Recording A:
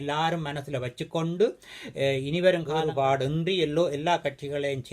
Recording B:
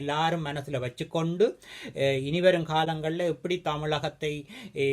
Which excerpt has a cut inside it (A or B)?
A